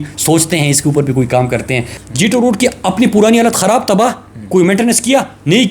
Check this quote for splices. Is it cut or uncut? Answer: cut